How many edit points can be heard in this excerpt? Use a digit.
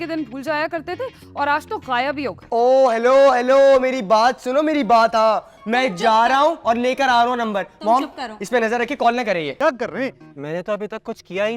2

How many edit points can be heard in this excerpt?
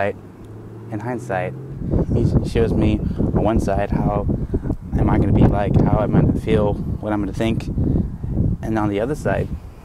1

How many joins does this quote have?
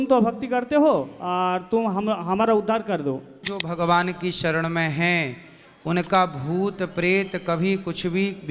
1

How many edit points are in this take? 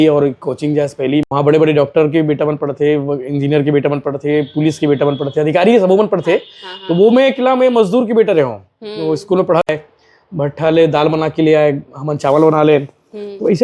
2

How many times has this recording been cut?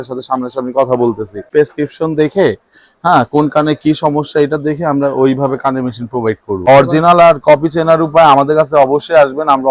2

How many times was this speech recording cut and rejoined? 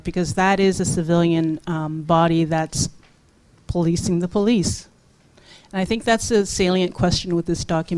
0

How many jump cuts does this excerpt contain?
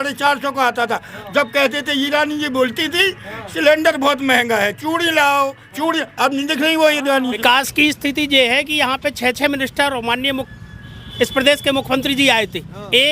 1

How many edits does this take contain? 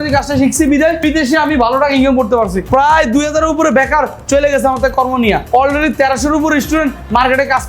3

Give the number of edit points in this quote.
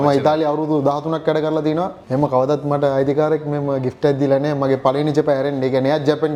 0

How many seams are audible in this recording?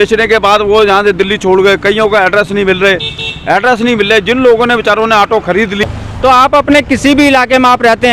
1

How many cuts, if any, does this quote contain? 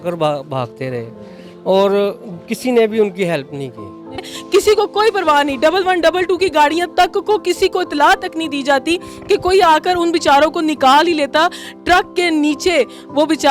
1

